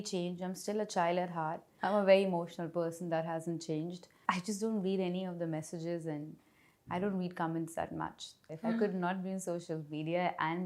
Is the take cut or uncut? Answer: cut